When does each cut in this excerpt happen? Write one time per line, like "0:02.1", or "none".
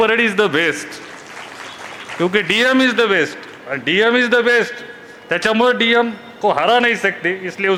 none